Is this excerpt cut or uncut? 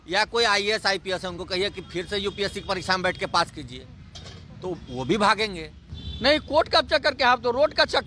cut